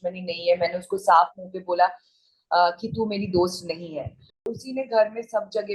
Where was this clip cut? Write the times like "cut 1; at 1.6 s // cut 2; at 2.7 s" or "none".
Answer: cut 1; at 4.4 s